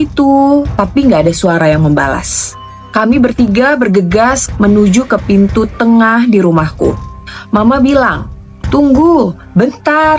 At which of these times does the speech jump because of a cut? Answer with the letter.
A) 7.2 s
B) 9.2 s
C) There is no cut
C